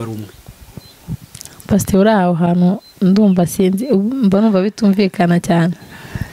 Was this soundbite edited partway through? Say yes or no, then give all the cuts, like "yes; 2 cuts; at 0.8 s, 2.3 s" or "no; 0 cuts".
no; 0 cuts